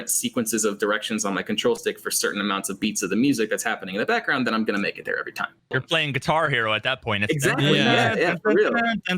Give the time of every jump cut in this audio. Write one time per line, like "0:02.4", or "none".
0:05.8